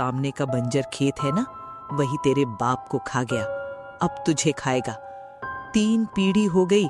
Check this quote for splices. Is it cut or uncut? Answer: uncut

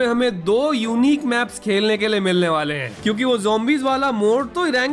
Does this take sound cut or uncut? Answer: cut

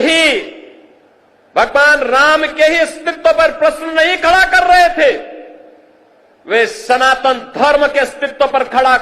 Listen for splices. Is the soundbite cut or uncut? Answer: uncut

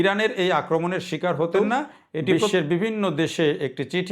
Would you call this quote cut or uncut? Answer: cut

